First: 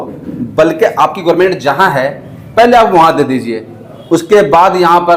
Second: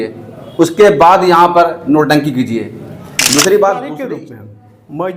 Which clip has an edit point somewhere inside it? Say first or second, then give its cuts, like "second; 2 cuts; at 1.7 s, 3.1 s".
second; 1 cut; at 3.9 s